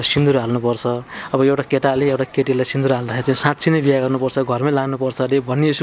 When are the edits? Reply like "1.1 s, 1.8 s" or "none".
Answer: none